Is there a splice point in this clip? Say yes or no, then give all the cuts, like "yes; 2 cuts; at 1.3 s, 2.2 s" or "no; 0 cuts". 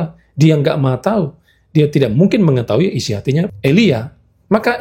yes; 1 cut; at 3.5 s